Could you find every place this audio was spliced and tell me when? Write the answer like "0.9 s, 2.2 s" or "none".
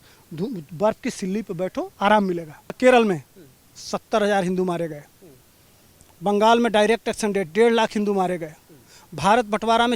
2.7 s

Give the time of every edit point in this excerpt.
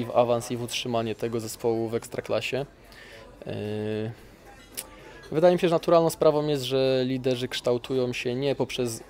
none

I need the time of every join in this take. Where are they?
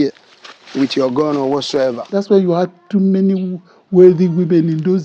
2.0 s

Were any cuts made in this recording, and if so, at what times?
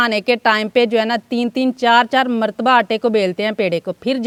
none

